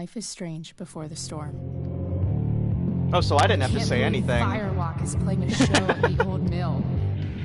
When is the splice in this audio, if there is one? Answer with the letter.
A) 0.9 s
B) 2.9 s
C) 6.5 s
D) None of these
A